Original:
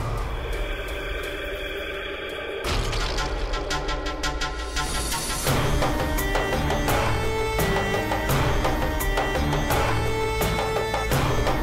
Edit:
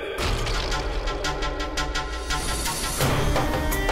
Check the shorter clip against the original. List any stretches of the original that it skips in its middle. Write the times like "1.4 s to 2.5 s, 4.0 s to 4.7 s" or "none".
none